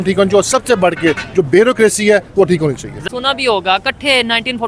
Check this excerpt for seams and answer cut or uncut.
cut